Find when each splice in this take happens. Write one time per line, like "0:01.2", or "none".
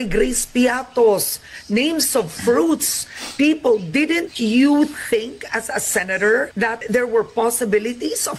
0:06.8